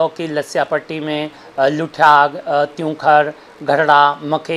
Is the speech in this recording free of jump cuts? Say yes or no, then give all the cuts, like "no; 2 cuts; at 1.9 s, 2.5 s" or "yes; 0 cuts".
yes; 0 cuts